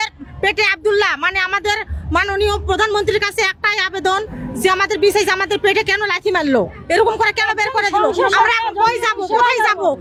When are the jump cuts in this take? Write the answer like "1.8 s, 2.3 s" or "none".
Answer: none